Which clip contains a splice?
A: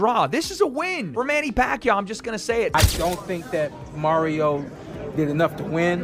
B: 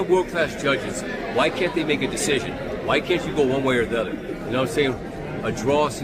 A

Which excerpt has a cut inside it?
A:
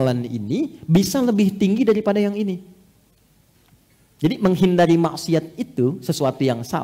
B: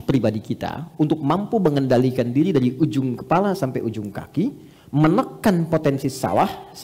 A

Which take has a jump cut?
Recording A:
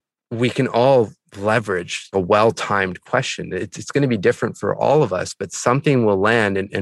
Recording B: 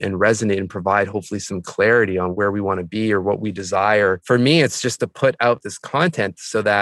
B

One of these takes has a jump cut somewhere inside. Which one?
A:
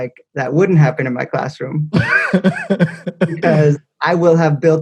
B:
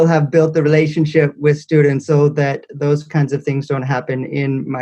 B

